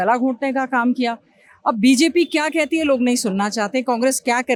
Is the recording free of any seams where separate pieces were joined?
yes; 0 cuts

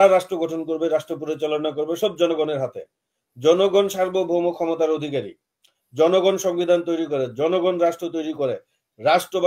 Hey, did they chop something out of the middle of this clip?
no; 0 cuts

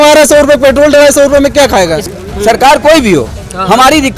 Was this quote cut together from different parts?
yes; 1 cut; at 2.1 s

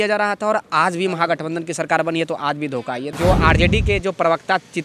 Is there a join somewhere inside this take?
yes; 1 cut; at 3.1 s

